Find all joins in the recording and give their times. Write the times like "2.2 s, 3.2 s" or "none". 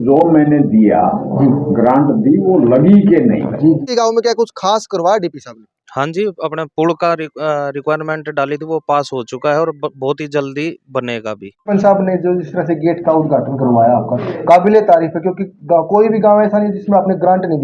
3.8 s, 11.7 s